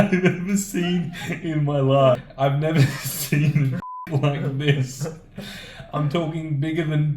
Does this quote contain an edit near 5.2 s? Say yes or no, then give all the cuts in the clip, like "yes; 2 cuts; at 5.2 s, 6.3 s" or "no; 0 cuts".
no; 1 cut; at 2.2 s